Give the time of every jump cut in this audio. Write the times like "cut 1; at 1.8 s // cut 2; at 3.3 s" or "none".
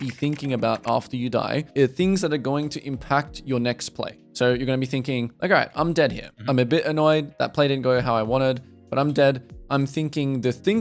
none